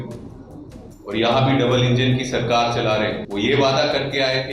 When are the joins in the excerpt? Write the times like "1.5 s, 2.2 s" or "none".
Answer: 3.2 s